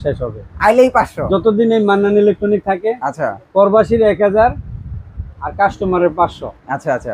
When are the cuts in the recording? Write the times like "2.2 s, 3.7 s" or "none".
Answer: none